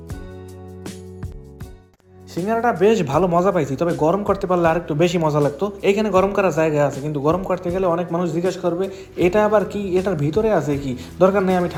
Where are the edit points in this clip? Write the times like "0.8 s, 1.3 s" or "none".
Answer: none